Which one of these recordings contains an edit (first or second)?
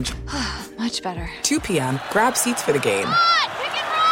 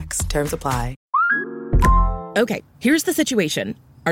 second